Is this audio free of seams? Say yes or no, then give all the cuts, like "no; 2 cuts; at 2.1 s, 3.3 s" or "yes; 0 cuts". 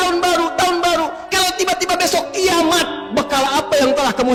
yes; 0 cuts